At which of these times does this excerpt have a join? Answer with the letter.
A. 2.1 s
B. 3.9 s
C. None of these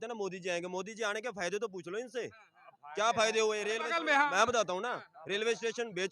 B